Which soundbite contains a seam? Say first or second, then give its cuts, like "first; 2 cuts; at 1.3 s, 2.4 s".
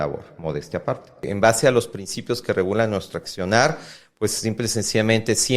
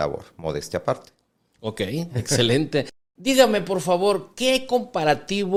first; 2 cuts; at 1.3 s, 3.2 s